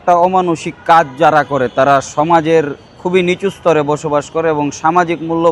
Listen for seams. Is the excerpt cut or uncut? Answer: uncut